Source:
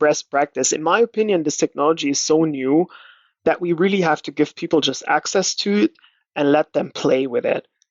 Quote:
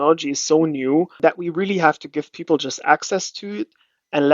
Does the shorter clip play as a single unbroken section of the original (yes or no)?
no